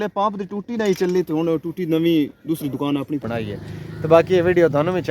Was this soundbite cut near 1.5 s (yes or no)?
no